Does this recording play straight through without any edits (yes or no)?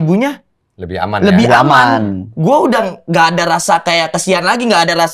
yes